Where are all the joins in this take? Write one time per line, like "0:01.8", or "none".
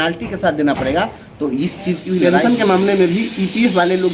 0:02.3